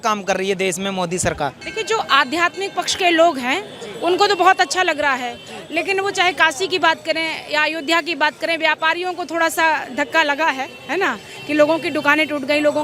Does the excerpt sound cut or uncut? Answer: uncut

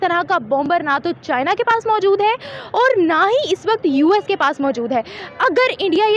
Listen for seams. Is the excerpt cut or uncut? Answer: uncut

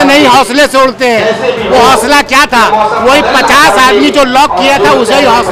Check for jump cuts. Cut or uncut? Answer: uncut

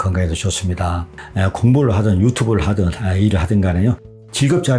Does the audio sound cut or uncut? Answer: cut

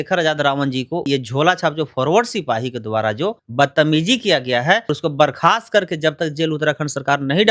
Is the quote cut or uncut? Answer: cut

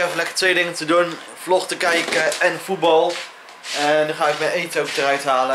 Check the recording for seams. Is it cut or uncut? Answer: uncut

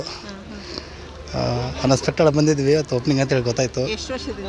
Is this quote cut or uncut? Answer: uncut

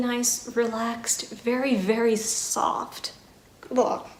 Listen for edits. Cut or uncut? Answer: uncut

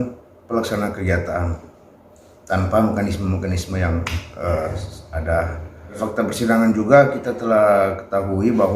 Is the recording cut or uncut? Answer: cut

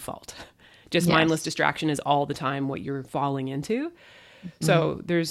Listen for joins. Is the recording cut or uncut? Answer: uncut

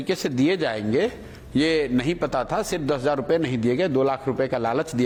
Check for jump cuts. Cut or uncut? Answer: uncut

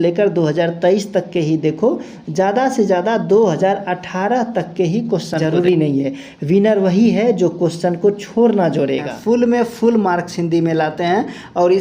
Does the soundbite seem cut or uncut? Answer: cut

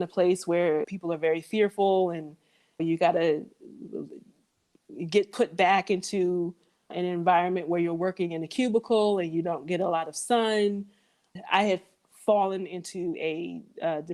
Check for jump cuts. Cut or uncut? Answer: uncut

